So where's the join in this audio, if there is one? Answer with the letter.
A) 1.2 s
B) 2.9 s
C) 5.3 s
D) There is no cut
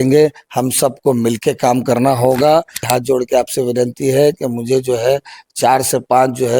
B